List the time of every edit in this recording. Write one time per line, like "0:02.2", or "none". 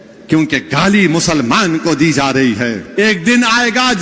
0:02.8